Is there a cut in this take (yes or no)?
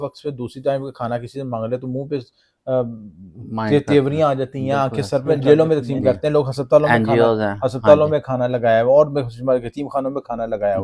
yes